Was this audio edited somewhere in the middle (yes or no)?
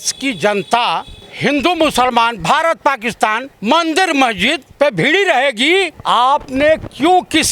yes